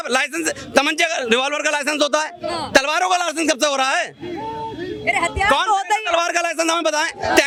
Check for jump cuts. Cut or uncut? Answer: uncut